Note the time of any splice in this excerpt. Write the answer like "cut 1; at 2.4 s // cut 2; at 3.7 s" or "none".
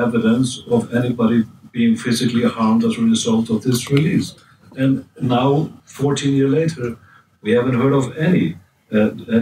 cut 1; at 5.8 s